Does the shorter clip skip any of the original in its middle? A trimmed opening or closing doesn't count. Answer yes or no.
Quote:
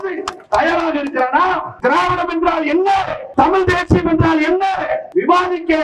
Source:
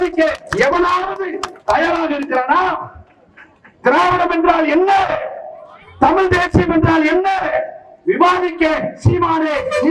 yes